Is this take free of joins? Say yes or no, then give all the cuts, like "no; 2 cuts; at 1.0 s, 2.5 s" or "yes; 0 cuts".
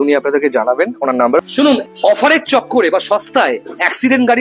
no; 1 cut; at 1.5 s